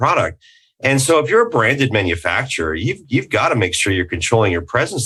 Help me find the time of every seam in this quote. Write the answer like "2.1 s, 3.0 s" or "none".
none